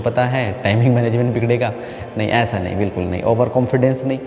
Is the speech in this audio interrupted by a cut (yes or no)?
no